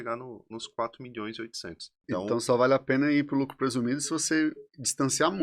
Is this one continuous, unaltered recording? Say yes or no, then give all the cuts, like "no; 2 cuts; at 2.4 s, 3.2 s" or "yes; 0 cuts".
no; 1 cut; at 1.9 s